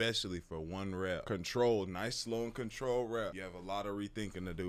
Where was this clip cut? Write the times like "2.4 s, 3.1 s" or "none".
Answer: none